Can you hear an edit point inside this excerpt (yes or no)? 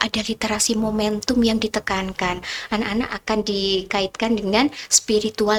no